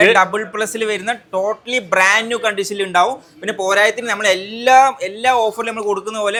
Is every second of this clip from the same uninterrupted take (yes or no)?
yes